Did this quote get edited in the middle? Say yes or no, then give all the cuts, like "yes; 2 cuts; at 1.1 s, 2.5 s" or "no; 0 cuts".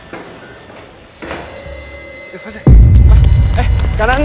yes; 1 cut; at 1.5 s